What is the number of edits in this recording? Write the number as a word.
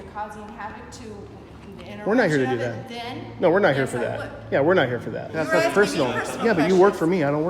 one